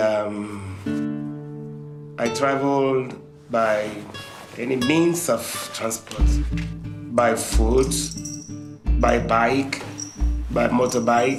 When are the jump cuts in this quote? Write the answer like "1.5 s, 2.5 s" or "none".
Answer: none